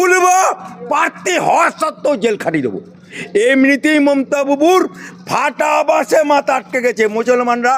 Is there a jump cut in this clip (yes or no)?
yes